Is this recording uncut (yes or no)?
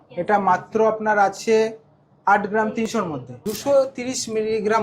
no